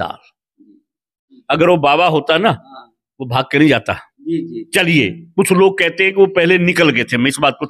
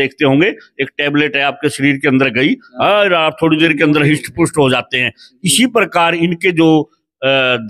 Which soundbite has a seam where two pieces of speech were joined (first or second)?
first